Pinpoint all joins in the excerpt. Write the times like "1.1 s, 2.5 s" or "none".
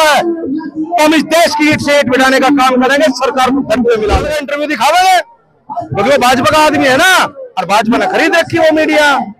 4.4 s